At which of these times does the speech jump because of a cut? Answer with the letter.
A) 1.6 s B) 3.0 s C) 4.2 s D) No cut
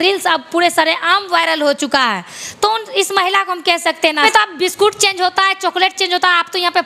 C